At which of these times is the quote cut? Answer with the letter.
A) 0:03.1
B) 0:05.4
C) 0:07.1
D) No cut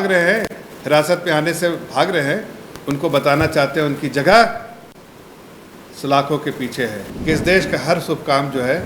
C